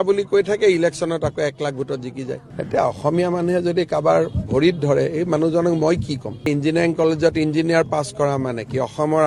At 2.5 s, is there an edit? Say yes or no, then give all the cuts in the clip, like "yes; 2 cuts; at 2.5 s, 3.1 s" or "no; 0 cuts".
yes; 2 cuts; at 2.5 s, 6.4 s